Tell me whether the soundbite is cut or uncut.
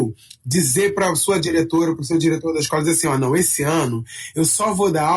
uncut